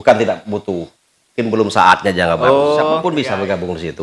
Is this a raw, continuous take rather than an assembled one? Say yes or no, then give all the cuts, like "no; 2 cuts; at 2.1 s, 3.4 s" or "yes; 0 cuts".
no; 1 cut; at 3.0 s